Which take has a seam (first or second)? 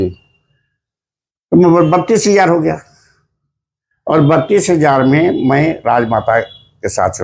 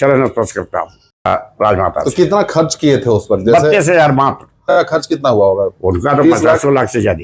second